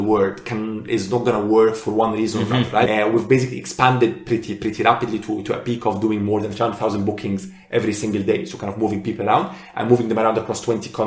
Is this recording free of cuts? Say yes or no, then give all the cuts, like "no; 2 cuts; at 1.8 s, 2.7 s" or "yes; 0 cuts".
no; 1 cut; at 2.9 s